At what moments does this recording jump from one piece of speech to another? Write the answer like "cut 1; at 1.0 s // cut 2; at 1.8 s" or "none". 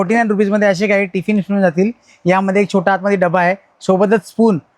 none